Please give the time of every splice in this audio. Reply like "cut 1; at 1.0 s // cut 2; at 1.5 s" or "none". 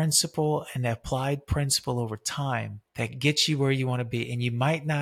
cut 1; at 2.8 s